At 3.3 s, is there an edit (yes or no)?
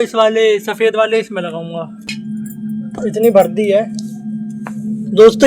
no